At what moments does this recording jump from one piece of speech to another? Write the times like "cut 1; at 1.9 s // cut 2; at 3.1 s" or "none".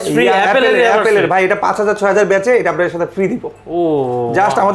none